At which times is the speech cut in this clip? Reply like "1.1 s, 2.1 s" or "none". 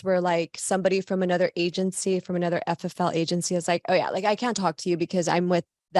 none